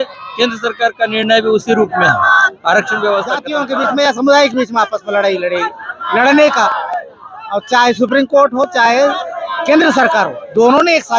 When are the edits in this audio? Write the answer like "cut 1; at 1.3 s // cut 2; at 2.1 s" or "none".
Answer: cut 1; at 3.5 s